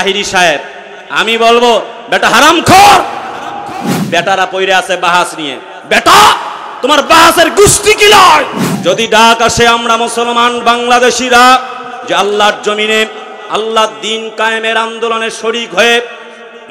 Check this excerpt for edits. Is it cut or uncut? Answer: cut